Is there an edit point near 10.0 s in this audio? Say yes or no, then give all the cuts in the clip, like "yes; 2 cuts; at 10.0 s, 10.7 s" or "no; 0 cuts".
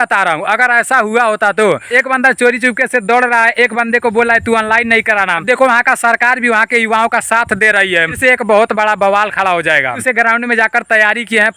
yes; 4 cuts; at 1.8 s, 5.4 s, 8.1 s, 10.0 s